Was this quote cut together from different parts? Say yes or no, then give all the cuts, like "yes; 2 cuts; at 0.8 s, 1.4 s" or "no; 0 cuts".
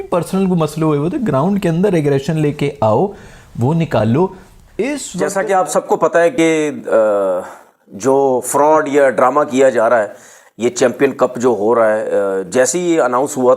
yes; 1 cut; at 5.1 s